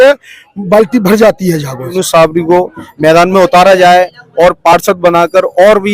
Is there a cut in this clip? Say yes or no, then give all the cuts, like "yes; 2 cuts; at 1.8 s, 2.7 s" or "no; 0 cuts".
yes; 1 cut; at 1.9 s